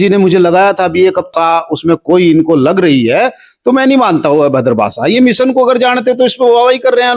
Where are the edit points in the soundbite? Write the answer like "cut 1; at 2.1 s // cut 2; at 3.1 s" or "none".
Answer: cut 1; at 1.3 s